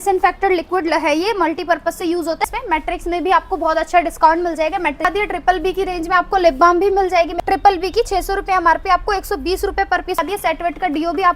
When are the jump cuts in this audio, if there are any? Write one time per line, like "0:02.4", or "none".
0:02.5
0:05.1
0:07.3
0:10.2